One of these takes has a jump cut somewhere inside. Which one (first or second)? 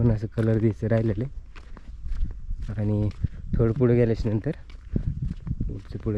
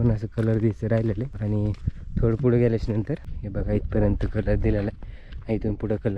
second